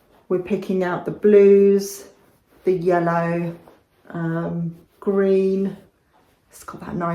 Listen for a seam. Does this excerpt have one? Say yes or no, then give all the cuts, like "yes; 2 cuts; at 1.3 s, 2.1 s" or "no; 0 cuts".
no; 0 cuts